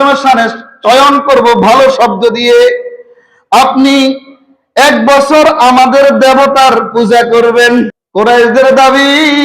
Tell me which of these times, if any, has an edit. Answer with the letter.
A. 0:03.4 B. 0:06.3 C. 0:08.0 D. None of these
C